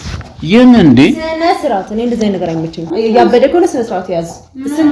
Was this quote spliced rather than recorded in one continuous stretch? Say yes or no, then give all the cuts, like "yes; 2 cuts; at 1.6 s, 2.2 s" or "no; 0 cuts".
yes; 1 cut; at 2.8 s